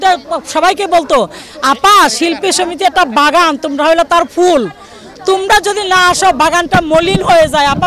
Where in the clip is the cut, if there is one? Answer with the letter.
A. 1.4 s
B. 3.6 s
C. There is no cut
C